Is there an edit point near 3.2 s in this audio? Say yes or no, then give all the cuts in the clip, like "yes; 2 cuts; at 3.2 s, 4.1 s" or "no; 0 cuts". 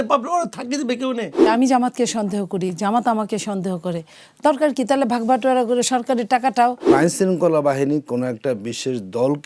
no; 2 cuts; at 1.5 s, 6.9 s